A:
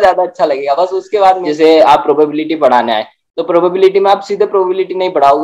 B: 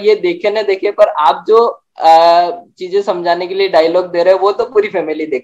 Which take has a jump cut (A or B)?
A